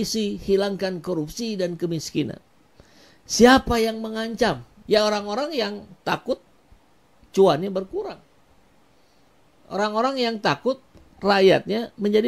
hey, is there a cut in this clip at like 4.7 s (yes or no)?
yes